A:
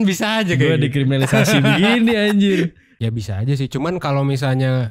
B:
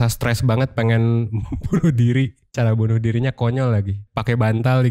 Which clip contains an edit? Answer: A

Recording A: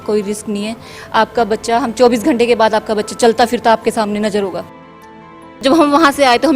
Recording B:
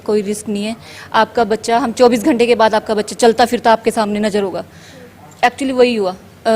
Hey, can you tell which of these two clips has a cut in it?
A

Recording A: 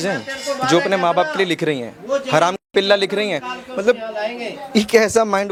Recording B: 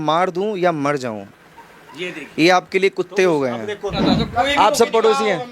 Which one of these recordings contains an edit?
B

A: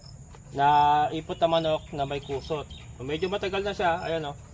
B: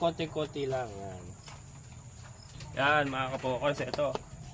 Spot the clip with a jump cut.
B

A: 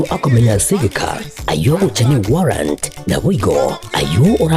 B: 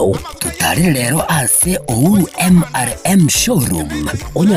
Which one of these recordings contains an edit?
B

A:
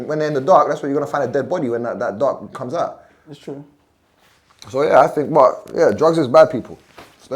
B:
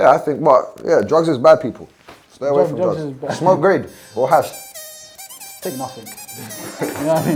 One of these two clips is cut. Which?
A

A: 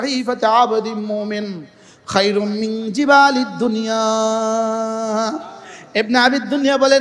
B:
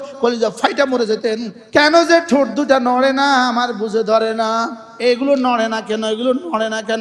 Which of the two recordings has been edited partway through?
B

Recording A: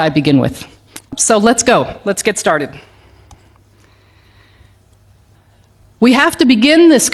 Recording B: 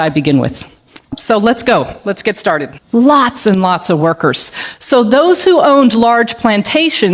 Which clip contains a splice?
B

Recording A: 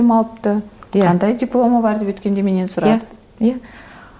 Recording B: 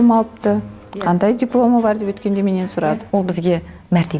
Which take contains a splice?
B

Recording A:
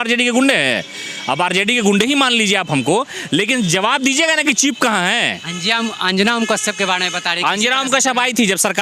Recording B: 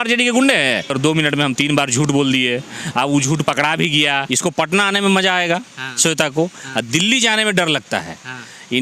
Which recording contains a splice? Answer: B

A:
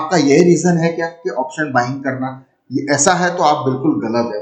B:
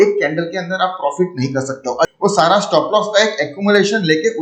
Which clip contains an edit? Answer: B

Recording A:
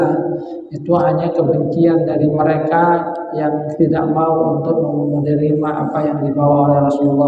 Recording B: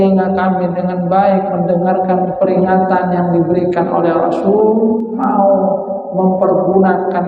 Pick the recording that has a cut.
B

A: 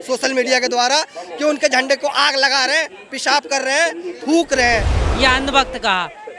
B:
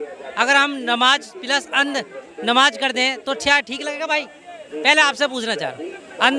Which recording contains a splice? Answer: A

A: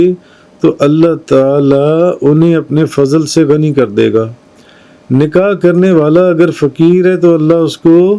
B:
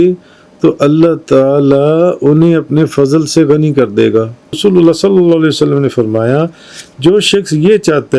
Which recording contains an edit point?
B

